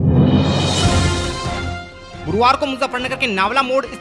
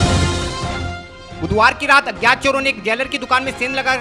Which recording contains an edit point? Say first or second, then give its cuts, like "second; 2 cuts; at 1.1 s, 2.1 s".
second; 1 cut; at 1.0 s